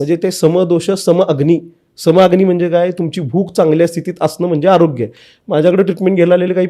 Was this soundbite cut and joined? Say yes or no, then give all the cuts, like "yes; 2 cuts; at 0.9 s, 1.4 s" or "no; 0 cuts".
no; 0 cuts